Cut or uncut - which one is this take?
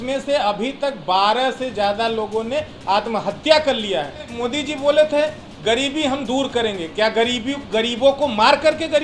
cut